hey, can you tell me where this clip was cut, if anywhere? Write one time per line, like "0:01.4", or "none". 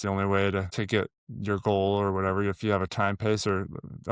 0:01.0